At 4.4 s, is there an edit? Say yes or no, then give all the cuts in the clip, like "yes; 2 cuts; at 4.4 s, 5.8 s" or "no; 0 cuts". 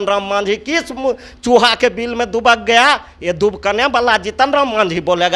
no; 0 cuts